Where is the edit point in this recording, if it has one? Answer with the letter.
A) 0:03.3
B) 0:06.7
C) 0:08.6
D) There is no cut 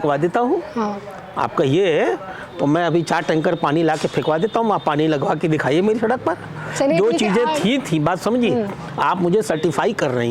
D